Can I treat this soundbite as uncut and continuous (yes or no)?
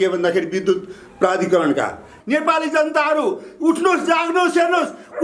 no